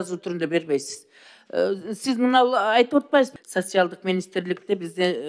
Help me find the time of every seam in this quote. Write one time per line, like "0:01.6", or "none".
0:03.3